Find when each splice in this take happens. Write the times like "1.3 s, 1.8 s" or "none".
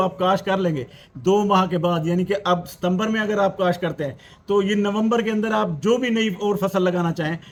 none